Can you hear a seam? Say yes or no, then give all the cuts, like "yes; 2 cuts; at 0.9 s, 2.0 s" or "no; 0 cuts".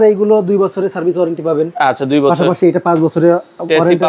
no; 0 cuts